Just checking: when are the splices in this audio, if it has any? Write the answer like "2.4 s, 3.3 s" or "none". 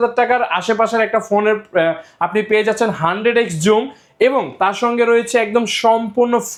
none